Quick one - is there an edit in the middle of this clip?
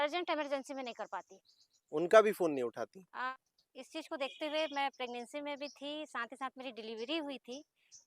yes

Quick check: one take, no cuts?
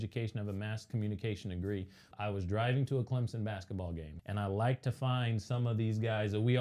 no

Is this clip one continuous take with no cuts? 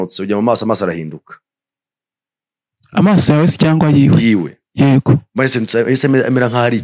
yes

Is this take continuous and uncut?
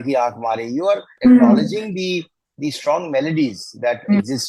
no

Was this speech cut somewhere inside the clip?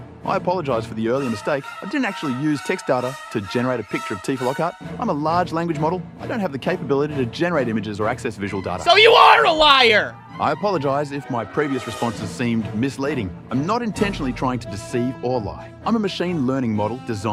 no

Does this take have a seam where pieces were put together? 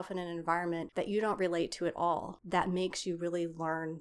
yes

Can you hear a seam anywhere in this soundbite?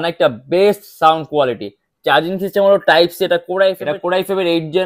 yes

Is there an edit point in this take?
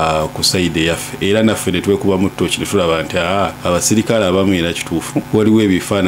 yes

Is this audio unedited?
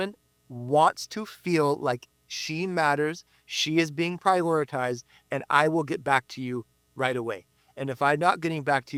yes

